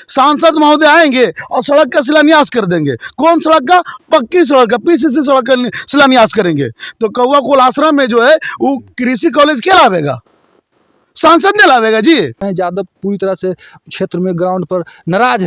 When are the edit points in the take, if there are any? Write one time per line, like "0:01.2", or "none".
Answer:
0:12.4